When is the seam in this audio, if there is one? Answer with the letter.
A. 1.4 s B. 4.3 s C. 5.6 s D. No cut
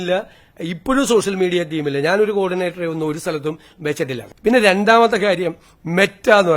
B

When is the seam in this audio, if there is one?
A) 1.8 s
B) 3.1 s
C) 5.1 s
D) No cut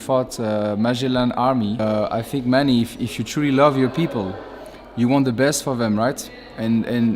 A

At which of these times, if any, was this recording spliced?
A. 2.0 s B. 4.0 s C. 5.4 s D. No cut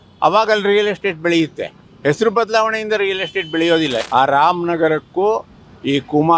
B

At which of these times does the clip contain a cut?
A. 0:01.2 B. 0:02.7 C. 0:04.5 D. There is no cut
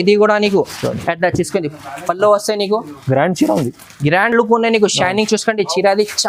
D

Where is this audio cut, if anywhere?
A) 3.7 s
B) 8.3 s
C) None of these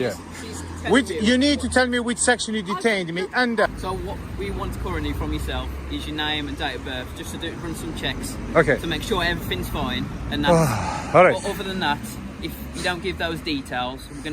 A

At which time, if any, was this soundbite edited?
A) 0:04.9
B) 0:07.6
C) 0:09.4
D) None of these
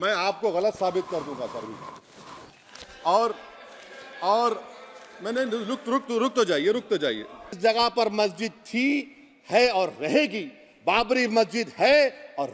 B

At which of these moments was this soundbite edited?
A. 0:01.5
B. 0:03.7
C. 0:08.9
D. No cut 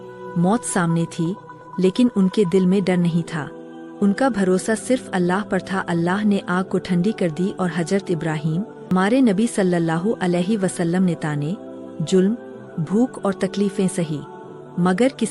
C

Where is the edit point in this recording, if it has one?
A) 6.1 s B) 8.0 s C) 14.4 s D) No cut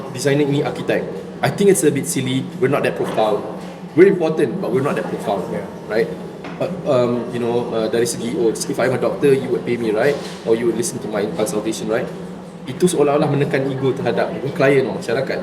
C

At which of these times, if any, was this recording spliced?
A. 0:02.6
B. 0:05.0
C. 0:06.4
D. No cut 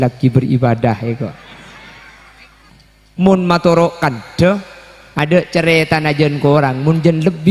A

